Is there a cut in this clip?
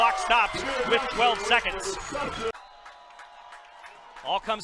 yes; 1 cut; at 2.6 s

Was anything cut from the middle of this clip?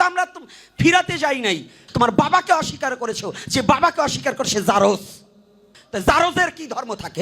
yes; 2 cuts; at 1.8 s, 5.8 s

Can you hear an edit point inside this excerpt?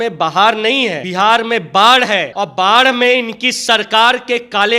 yes; 2 cuts; at 1.0 s, 2.3 s

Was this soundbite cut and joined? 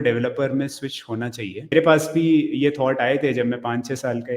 yes; 1 cut; at 1.7 s

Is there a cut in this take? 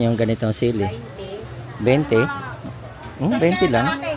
no; 0 cuts

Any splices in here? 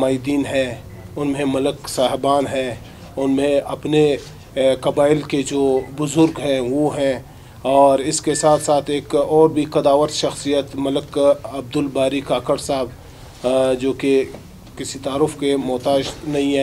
no; 0 cuts

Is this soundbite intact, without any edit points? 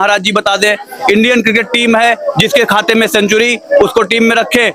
yes; 0 cuts

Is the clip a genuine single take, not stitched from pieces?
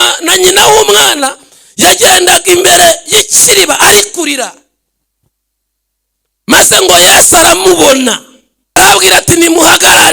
no; 1 cut; at 8.8 s

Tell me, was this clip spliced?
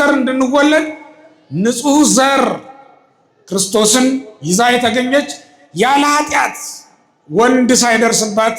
no; 0 cuts

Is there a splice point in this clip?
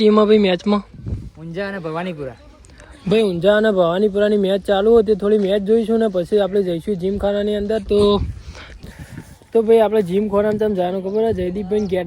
no; 0 cuts

